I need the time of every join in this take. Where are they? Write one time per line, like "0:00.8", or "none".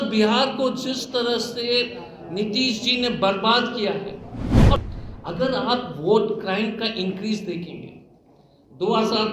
0:04.8